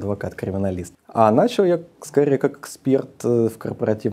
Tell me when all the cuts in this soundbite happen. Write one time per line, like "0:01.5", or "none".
0:00.9